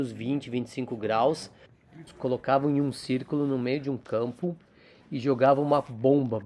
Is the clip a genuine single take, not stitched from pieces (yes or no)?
no